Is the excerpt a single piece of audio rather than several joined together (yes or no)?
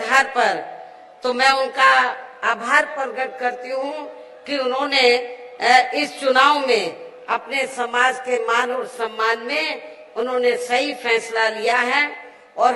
yes